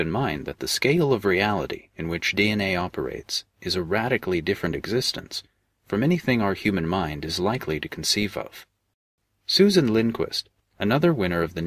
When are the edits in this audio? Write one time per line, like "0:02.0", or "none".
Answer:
0:06.9